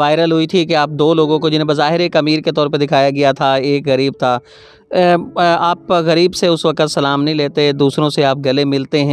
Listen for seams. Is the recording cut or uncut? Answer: uncut